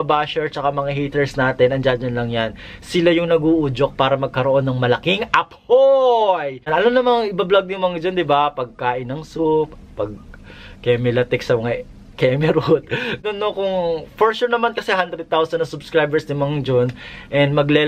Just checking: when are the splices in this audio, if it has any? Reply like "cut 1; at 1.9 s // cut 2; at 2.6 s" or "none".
cut 1; at 6.7 s // cut 2; at 13.2 s